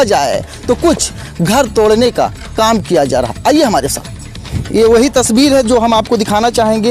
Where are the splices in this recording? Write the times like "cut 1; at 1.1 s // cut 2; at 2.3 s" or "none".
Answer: cut 1; at 1.2 s